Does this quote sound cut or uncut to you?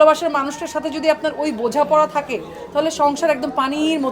uncut